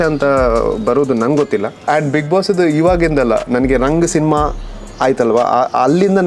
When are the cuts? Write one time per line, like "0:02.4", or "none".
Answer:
0:01.8